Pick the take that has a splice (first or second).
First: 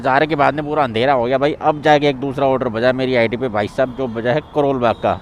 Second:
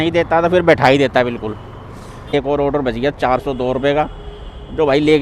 second